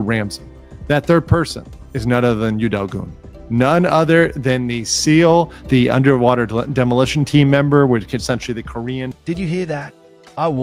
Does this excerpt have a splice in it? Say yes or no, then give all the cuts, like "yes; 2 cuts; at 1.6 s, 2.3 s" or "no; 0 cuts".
no; 0 cuts